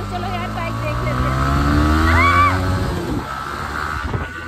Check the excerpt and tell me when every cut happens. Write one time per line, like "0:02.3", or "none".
none